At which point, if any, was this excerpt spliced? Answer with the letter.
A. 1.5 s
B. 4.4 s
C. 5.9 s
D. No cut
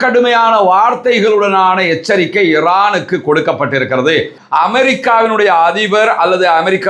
B